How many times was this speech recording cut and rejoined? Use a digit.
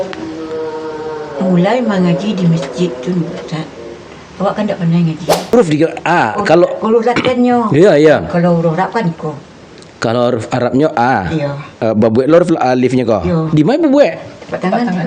1